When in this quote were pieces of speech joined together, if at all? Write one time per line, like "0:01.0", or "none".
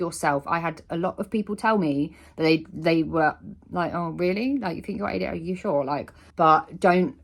0:06.2